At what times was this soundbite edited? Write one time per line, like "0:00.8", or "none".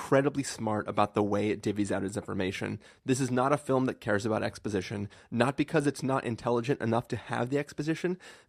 none